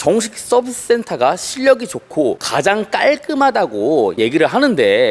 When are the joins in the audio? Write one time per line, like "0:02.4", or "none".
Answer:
0:04.1